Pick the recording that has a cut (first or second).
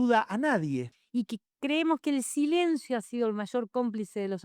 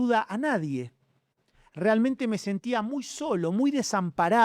first